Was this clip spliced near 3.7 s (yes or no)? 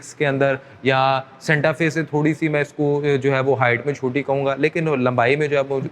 no